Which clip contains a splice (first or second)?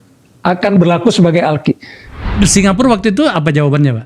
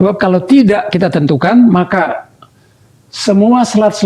first